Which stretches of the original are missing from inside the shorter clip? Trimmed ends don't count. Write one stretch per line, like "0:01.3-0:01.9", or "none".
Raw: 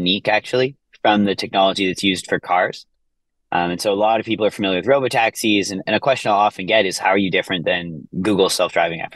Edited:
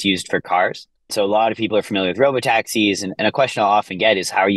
0:03.1-0:03.8